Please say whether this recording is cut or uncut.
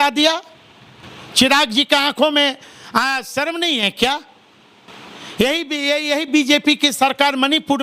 uncut